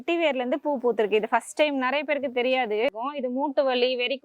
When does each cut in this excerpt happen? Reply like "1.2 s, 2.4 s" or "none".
3.0 s